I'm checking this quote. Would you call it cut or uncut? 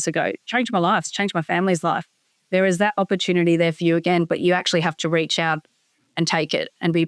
uncut